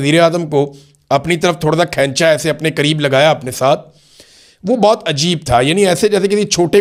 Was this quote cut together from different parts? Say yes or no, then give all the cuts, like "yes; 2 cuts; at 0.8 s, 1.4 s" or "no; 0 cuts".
no; 0 cuts